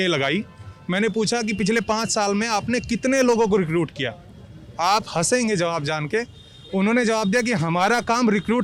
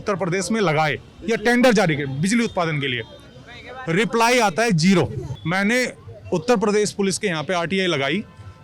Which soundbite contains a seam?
second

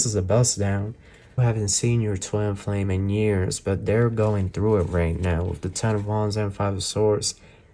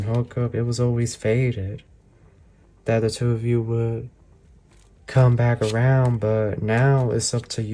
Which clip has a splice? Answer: first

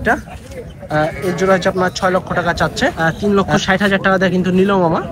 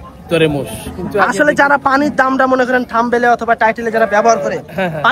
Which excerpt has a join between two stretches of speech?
first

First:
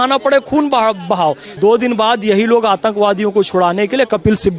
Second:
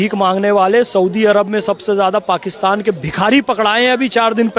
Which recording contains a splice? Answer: first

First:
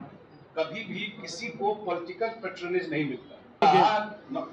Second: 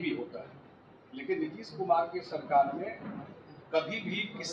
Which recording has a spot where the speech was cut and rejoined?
first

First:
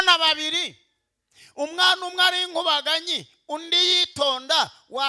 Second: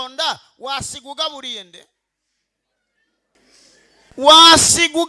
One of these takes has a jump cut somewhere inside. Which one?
second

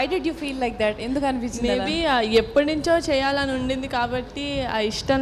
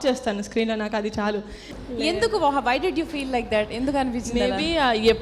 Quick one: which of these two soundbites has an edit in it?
second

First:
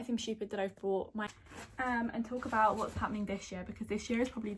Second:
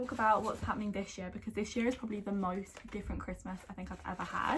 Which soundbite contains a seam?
first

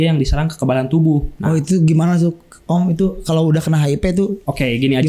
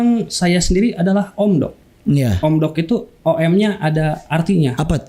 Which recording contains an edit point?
first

